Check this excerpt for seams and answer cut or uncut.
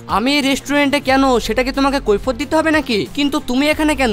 uncut